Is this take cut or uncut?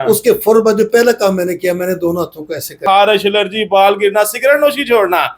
cut